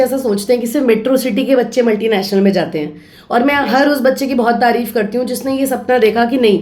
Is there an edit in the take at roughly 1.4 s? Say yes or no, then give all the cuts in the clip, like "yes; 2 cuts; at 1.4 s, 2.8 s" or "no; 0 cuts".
no; 0 cuts